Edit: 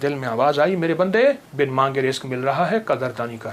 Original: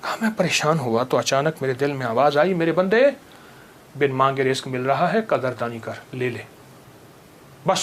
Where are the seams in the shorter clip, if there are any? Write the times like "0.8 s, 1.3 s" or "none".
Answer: 1.5 s